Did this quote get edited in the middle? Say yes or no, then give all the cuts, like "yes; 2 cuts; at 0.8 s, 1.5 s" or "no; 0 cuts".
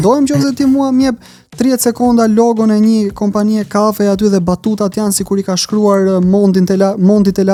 no; 0 cuts